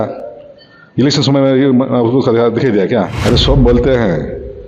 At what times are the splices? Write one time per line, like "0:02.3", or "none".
0:03.1

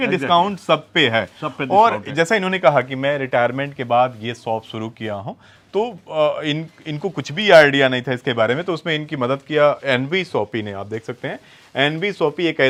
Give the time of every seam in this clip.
none

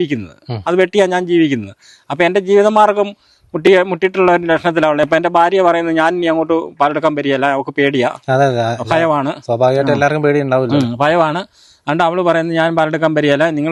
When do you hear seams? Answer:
none

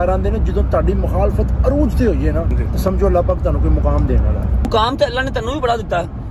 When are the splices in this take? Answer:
0:02.6
0:04.7

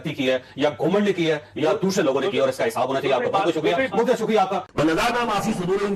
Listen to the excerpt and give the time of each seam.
0:04.7

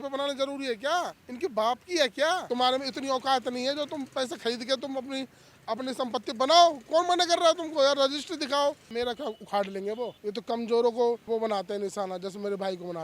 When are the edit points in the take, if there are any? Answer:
0:01.2
0:02.4
0:08.9
0:10.2
0:11.2

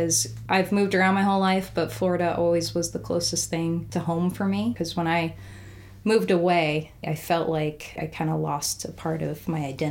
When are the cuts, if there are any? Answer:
0:03.9
0:04.8
0:07.1
0:08.0

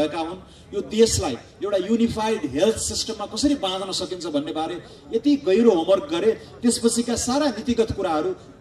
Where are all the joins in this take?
none

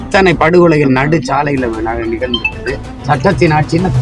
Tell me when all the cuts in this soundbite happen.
0:02.9

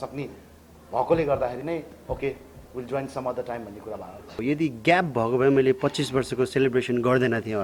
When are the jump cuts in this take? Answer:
0:04.4

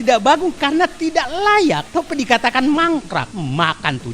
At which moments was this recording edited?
0:01.8
0:03.3

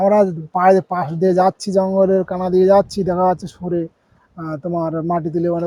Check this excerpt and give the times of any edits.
none

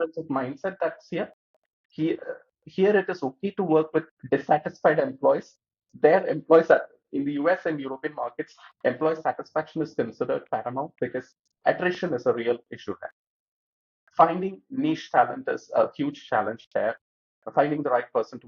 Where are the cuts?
none

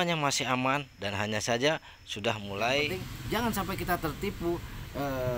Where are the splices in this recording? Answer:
0:02.9

